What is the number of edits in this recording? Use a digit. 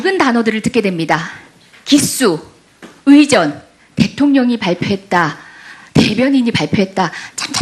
0